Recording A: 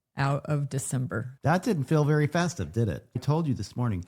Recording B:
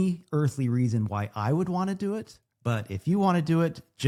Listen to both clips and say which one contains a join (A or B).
A